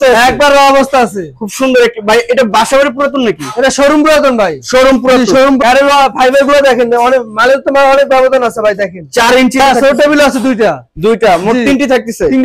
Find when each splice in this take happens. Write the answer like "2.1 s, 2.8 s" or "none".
5.6 s, 9.6 s